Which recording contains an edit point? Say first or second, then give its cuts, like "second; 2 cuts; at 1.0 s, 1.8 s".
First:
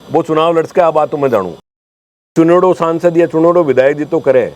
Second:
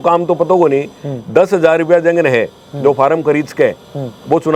first; 1 cut; at 2.3 s